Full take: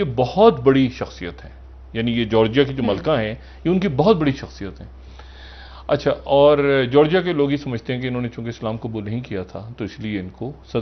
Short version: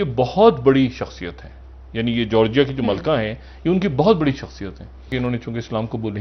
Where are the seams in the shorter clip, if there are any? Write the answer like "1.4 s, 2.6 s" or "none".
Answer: 5.1 s